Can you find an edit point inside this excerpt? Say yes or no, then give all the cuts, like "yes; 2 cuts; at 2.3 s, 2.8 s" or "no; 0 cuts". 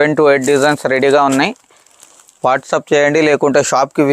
no; 0 cuts